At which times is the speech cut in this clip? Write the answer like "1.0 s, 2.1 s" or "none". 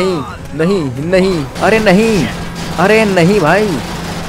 1.5 s